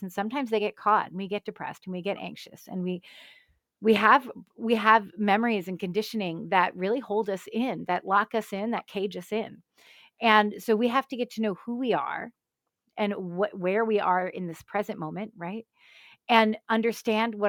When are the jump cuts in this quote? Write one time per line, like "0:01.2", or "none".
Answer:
none